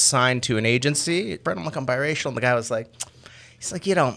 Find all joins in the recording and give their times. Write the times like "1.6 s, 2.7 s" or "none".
1.4 s